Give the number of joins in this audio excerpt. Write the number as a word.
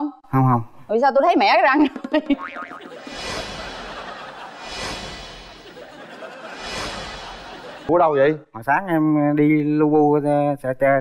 one